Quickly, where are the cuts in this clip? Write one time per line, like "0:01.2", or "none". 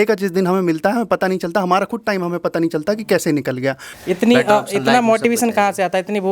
0:03.9